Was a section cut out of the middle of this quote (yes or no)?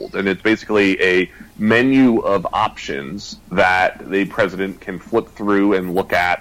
no